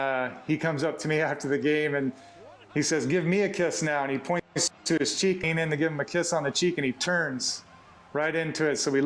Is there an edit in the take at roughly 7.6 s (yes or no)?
no